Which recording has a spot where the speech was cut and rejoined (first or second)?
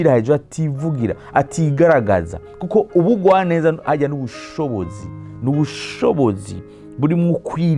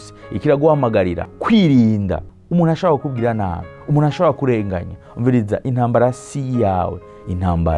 second